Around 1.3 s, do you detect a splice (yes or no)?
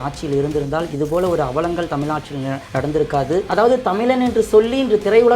no